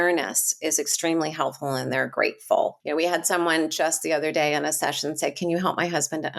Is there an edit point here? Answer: yes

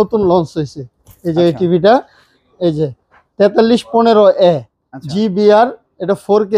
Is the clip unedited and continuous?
yes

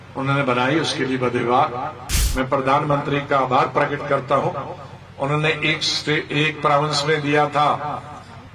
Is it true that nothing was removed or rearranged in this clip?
no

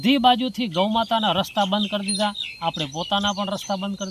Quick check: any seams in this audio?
no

